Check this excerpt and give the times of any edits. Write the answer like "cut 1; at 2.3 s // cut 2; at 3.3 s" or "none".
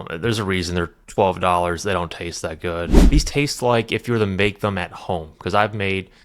cut 1; at 3.0 s